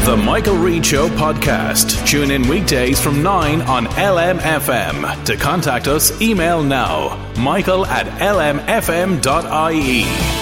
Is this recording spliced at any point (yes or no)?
no